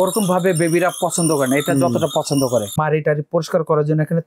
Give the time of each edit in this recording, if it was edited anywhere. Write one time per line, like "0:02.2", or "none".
0:02.8